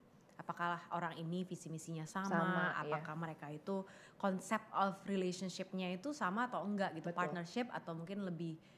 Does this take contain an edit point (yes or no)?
no